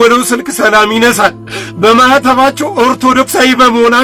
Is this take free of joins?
yes; 0 cuts

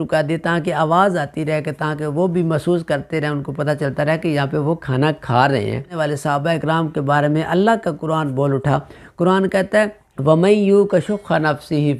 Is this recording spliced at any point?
yes; 2 cuts; at 5.9 s, 10.1 s

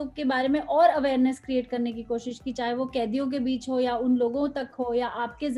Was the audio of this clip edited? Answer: no; 0 cuts

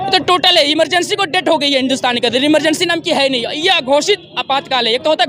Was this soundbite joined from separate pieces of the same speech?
no; 0 cuts

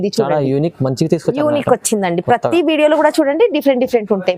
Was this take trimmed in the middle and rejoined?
no; 0 cuts

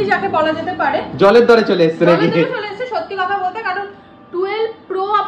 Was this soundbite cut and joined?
no; 0 cuts

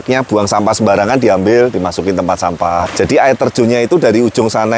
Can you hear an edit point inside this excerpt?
yes; 1 cut; at 2.9 s

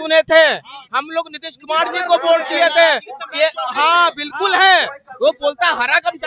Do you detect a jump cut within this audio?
no; 0 cuts

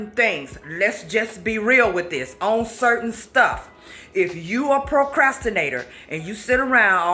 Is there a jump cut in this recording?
no; 0 cuts

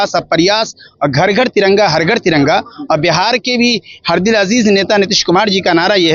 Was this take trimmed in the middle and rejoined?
no; 0 cuts

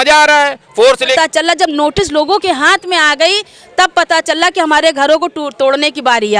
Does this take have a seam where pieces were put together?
yes; 1 cut; at 1.1 s

